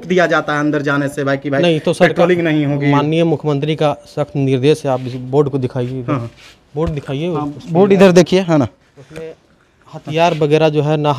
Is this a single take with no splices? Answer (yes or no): yes